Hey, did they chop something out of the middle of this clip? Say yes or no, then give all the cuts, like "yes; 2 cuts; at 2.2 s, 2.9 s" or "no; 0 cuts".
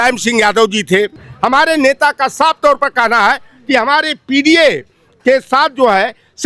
yes; 1 cut; at 1.2 s